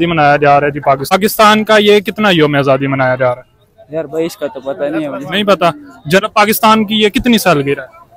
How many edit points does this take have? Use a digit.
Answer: 2